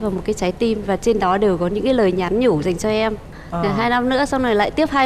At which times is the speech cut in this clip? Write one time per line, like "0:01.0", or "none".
0:03.3